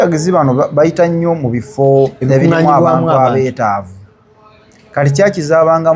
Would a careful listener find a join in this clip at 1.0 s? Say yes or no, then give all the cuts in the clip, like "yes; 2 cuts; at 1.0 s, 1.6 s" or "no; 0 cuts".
no; 0 cuts